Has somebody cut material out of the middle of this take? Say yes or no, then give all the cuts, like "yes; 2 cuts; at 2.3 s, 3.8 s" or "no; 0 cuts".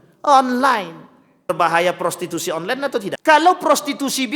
yes; 2 cuts; at 1.5 s, 3.2 s